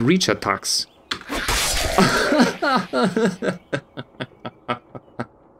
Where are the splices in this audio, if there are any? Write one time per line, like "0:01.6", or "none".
0:02.0